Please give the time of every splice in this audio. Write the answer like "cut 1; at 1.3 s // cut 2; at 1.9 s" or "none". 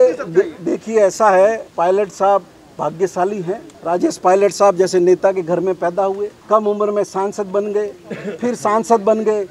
cut 1; at 1.7 s // cut 2; at 3.7 s // cut 3; at 6.3 s